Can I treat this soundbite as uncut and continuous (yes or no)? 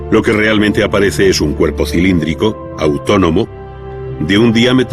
no